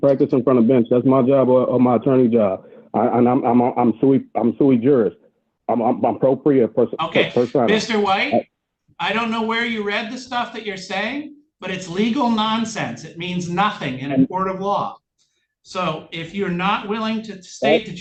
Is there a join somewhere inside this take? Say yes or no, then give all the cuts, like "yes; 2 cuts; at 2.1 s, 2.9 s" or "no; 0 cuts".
no; 0 cuts